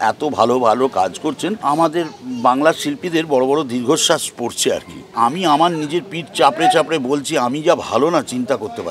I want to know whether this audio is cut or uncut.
cut